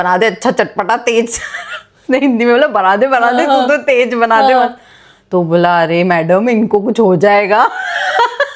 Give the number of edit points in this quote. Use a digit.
0